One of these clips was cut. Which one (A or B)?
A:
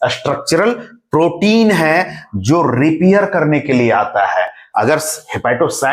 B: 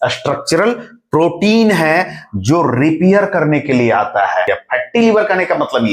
B